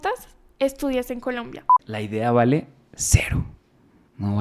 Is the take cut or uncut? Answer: cut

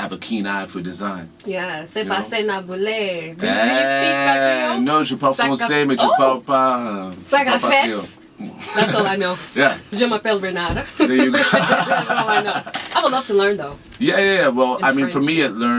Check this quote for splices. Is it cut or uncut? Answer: cut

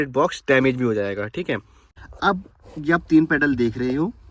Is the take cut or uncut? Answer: cut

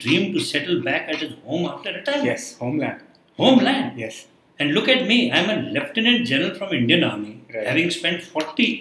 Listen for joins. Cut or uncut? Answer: uncut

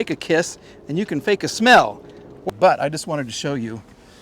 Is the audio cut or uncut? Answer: cut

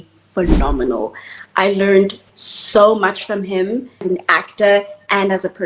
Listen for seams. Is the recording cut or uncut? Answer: cut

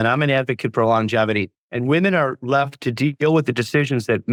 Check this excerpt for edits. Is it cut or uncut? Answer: uncut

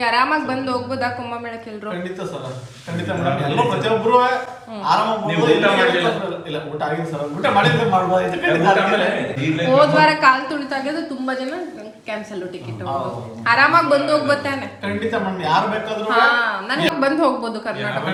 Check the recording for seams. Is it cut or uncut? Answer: uncut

